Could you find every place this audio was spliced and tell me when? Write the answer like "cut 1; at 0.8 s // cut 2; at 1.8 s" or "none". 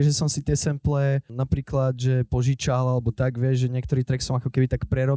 cut 1; at 1.3 s